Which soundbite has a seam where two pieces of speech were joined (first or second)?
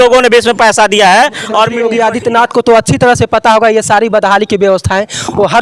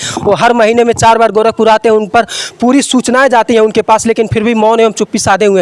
first